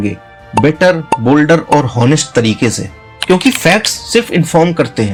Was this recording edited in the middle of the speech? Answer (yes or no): no